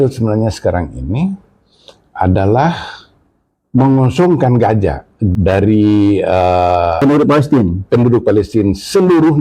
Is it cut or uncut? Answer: cut